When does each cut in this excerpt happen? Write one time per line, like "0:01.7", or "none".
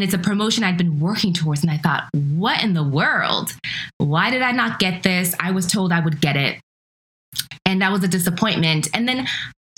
none